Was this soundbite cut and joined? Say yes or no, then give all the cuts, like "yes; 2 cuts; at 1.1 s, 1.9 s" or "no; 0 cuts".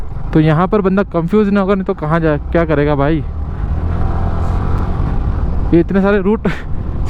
no; 0 cuts